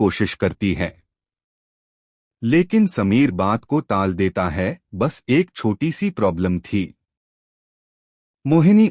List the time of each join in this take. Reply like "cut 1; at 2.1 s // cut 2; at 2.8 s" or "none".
cut 1; at 4.8 s